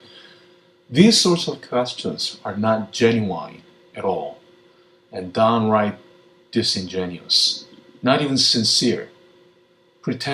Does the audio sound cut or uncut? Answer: cut